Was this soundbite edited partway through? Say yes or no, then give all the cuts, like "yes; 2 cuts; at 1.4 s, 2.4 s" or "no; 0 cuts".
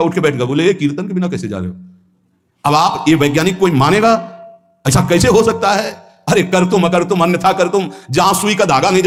no; 0 cuts